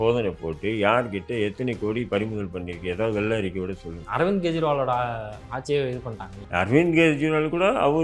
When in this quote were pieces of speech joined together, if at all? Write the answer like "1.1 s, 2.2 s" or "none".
none